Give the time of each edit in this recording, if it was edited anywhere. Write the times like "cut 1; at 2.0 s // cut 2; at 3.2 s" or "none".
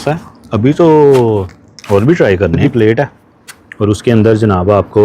cut 1; at 2.6 s

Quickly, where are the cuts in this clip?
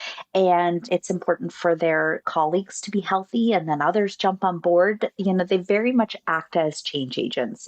cut 1; at 0.8 s // cut 2; at 2.2 s

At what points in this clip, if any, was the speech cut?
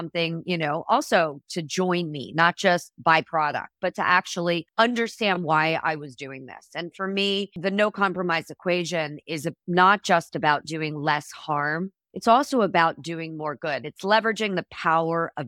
cut 1; at 4.7 s // cut 2; at 7.5 s // cut 3; at 12.0 s

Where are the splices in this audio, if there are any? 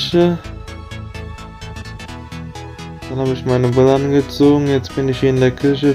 cut 1; at 0.8 s // cut 2; at 3.1 s

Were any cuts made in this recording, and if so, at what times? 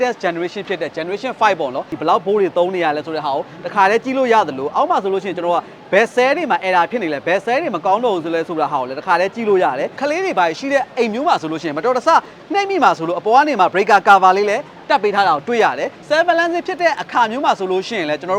cut 1; at 1.9 s // cut 2; at 10.0 s // cut 3; at 15.9 s

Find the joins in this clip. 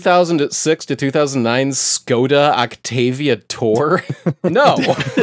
none

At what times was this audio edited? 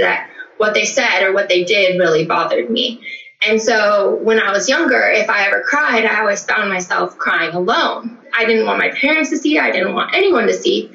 cut 1; at 8.2 s

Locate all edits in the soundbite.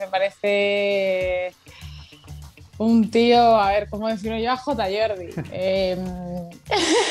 none

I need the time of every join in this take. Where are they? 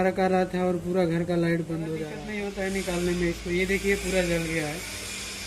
cut 1; at 2.2 s

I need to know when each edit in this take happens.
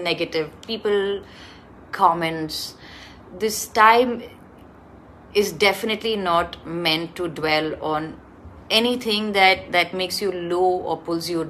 none

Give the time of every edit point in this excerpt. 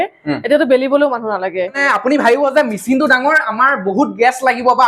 cut 1; at 1.8 s

